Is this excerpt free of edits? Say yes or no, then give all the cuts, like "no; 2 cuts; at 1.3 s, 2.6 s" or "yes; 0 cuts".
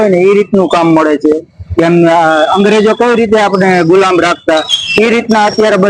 yes; 0 cuts